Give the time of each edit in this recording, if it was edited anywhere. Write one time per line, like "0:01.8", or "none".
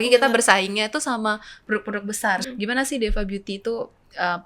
0:02.4